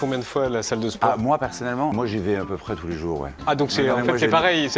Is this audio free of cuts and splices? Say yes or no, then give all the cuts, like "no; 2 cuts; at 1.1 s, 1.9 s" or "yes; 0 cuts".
no; 2 cuts; at 1.9 s, 3.3 s